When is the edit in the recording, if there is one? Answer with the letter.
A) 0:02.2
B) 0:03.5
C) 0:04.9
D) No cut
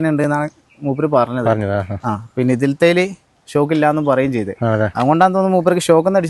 D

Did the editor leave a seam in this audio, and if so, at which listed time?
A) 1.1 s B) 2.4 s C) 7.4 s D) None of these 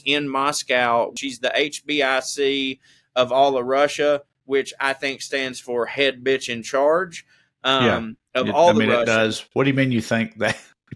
A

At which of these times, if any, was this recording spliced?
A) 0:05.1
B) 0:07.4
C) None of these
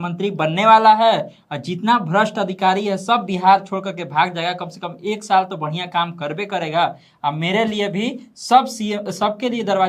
C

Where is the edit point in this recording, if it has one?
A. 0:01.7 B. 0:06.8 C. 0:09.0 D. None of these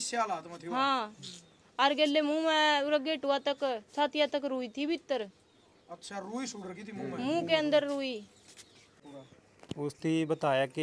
C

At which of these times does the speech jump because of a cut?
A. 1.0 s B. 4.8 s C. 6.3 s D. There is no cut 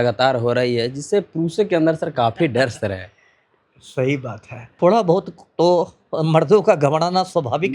B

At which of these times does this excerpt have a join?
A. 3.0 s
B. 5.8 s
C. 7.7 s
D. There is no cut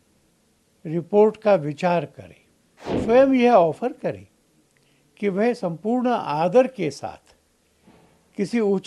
A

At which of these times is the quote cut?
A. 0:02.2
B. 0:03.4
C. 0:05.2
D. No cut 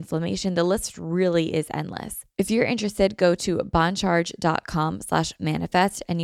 A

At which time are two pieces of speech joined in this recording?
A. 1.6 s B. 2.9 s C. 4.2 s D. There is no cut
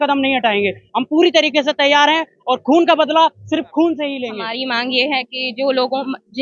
C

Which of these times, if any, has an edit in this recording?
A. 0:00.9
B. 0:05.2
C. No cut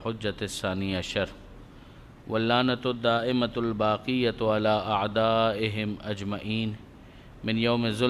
B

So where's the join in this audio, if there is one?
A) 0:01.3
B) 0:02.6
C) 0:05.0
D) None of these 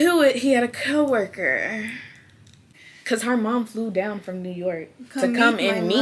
B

